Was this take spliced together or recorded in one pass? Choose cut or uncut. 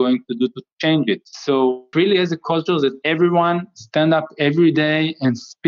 cut